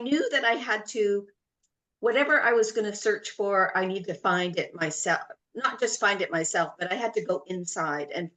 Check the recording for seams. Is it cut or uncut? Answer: uncut